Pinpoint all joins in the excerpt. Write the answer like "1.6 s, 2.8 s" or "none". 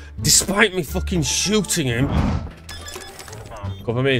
2.1 s